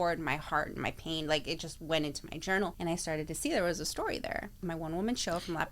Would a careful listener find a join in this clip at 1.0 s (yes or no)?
no